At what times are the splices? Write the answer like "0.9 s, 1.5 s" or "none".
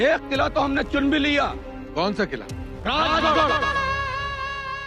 3.6 s